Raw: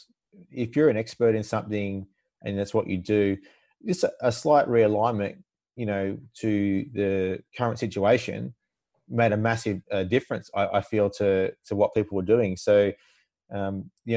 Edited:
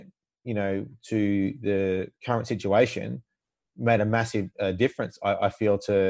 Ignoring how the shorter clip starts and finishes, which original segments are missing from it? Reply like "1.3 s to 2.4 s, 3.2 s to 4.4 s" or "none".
none